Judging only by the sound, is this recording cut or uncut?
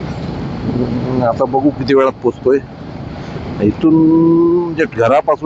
uncut